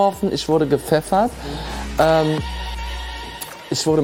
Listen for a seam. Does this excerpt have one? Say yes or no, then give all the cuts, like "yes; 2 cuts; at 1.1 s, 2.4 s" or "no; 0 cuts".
no; 0 cuts